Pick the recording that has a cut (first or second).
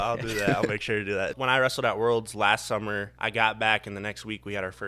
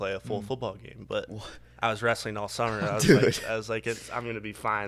first